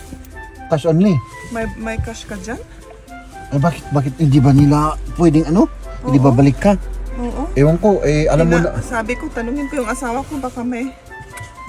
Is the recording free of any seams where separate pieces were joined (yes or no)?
yes